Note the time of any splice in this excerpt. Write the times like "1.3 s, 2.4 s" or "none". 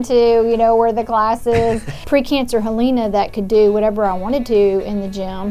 1.9 s